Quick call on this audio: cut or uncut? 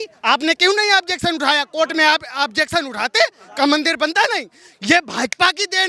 uncut